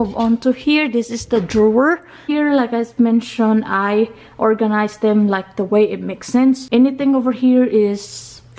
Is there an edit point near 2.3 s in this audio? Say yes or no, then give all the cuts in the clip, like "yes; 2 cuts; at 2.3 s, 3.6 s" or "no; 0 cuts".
yes; 2 cuts; at 2.3 s, 6.6 s